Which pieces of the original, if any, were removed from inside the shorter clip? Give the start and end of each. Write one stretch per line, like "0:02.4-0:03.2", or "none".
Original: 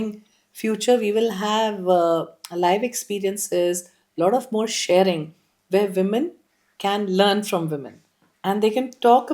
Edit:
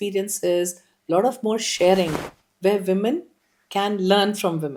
none